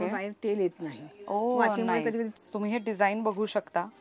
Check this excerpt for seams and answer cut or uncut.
cut